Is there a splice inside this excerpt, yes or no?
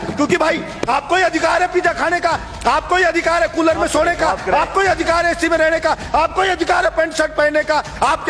no